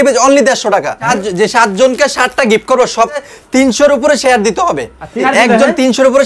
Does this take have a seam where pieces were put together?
yes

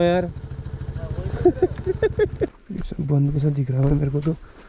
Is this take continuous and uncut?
no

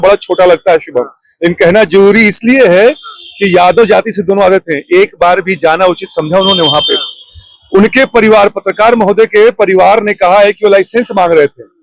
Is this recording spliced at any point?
no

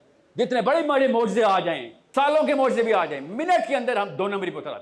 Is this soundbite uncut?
no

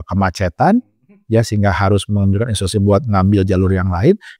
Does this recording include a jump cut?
no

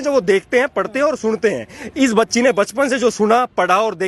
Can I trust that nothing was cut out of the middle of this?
yes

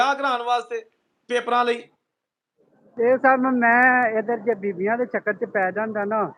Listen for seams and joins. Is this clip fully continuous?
yes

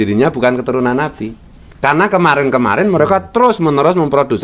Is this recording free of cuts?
no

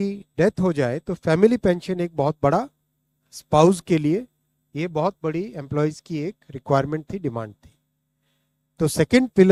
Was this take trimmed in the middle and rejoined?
no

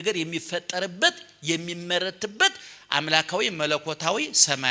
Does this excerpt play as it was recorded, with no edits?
yes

